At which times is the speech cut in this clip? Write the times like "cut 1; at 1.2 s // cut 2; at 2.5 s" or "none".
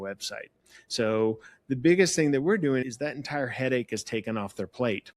none